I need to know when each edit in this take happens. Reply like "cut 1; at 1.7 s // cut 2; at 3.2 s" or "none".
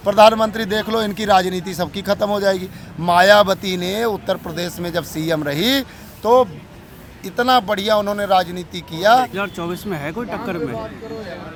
none